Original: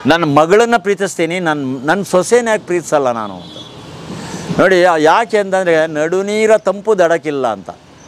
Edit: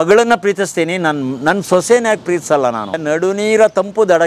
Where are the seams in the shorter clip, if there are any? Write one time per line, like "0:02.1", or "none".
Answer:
0:03.0